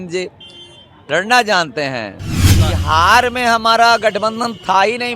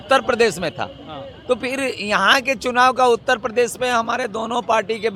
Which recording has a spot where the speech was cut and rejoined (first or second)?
first